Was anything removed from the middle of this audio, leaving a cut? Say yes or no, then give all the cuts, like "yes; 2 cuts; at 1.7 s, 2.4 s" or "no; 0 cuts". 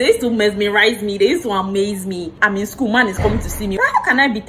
yes; 2 cuts; at 2.3 s, 3.8 s